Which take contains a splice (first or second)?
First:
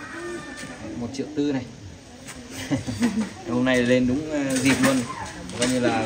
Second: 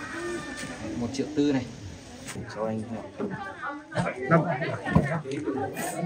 second